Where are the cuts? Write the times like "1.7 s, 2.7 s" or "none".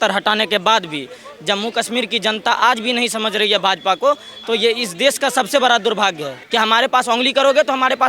6.3 s

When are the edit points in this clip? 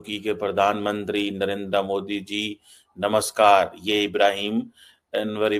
none

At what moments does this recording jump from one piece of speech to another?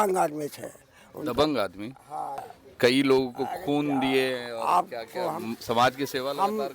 2.4 s

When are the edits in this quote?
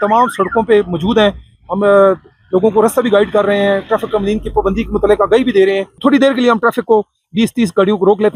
5.9 s

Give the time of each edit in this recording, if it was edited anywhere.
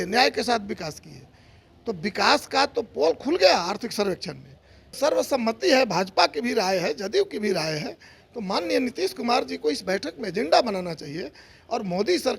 5.0 s

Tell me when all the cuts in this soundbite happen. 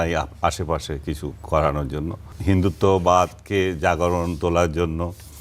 2.3 s

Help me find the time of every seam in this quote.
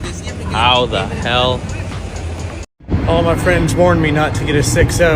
2.7 s

